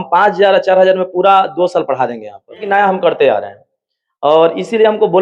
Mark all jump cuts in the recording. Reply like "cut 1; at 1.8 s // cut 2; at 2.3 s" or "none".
cut 1; at 2.7 s